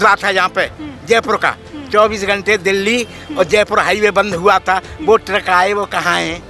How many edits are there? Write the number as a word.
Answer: zero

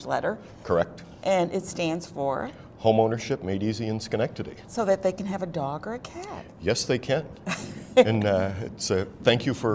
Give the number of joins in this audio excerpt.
zero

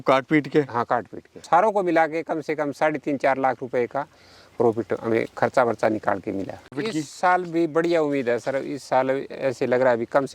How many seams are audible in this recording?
two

